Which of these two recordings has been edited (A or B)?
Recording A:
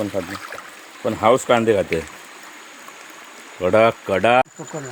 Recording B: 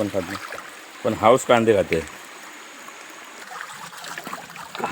B